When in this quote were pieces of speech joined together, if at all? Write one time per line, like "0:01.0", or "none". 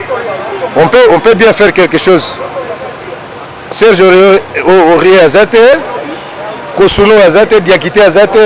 none

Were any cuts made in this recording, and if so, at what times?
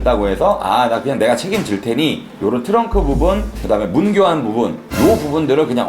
0:04.8

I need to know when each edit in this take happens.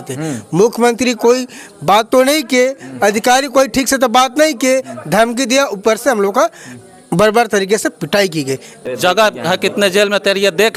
0:08.8

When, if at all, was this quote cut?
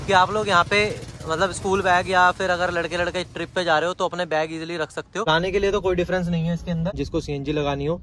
0:05.3
0:07.0

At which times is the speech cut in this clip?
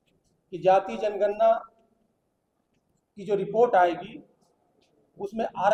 none

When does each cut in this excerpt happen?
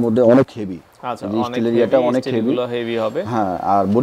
none

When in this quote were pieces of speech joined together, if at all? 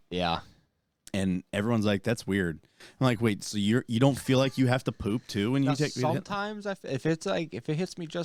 none

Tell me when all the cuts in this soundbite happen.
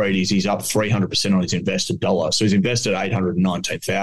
none

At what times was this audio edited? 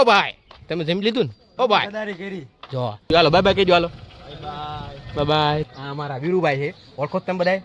0:03.1
0:05.7

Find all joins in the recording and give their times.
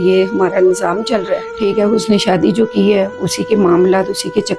0:01.5

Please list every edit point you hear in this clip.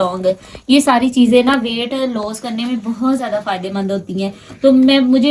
none

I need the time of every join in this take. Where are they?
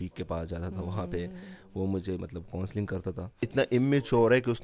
0:03.5

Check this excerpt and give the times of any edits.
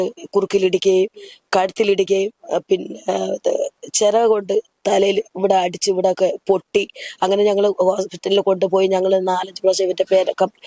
none

